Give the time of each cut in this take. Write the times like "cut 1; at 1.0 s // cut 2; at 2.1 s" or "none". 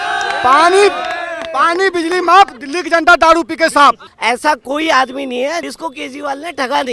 cut 1; at 4.1 s // cut 2; at 5.7 s